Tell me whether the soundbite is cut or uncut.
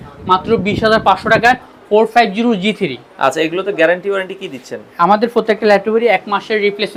uncut